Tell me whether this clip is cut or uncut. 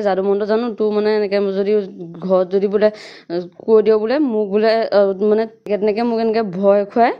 cut